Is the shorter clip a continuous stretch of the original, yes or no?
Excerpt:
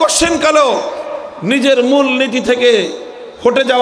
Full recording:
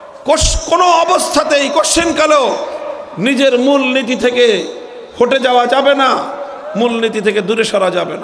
yes